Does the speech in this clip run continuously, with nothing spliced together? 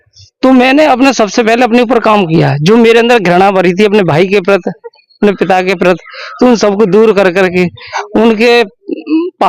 yes; 0 cuts

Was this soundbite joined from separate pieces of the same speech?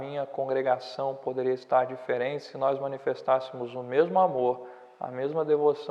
no; 0 cuts

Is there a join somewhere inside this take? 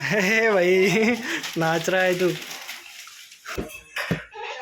yes; 1 cut; at 3.4 s

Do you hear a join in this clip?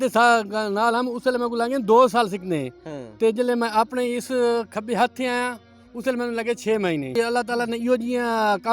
yes; 1 cut; at 7.1 s

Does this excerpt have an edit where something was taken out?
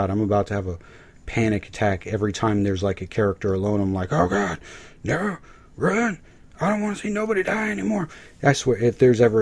no; 0 cuts

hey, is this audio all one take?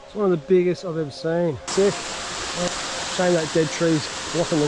no; 1 cut; at 1.7 s

